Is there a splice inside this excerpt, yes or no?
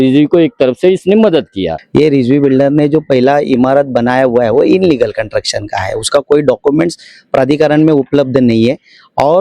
yes